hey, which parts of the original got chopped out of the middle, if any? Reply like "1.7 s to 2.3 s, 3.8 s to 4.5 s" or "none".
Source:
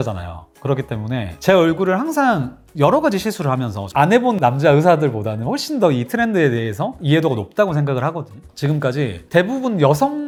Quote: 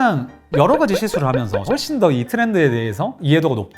3.8 s to 5.4 s

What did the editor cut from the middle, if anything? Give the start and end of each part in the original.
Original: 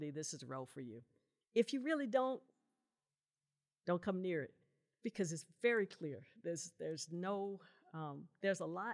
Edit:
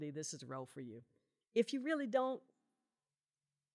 none

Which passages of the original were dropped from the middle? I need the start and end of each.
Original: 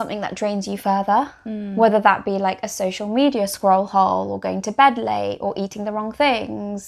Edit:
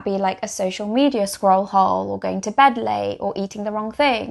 none

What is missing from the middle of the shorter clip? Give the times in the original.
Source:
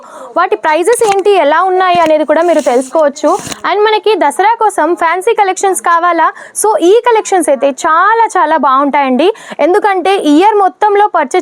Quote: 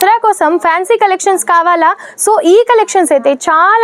none

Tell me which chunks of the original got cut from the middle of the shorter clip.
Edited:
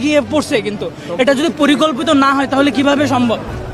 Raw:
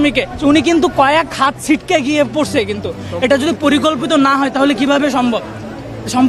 none

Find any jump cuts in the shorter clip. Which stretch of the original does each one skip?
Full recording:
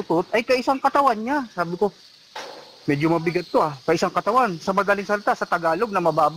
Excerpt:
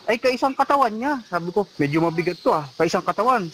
2.0 s to 2.8 s

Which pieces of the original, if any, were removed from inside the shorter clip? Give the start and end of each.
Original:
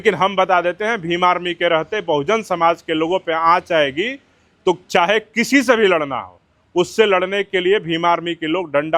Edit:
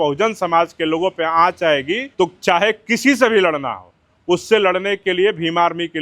4.1 s to 4.5 s

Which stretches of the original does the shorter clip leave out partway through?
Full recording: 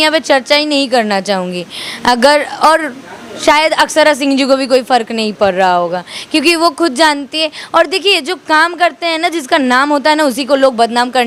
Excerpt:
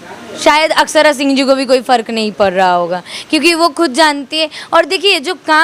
none

